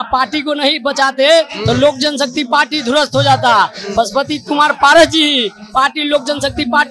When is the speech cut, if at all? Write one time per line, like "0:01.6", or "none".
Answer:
none